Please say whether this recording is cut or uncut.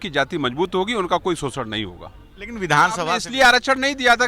cut